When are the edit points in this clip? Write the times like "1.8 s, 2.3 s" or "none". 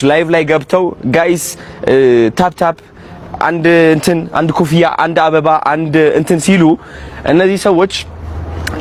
none